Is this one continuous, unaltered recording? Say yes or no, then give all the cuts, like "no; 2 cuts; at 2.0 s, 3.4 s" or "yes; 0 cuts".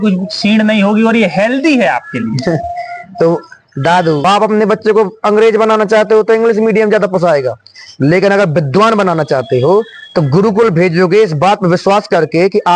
no; 1 cut; at 4.2 s